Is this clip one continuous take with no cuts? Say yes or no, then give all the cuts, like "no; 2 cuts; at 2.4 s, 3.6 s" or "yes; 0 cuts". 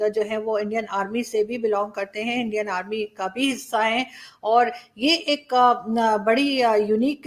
yes; 0 cuts